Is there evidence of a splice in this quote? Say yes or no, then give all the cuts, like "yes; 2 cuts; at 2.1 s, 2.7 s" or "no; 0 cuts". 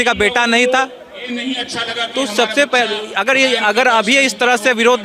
no; 0 cuts